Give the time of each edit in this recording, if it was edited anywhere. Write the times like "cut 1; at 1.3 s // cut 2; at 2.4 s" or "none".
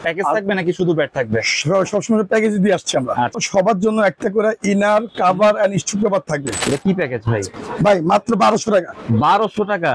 cut 1; at 3.3 s // cut 2; at 6.6 s